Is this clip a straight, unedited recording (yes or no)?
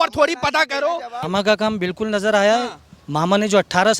no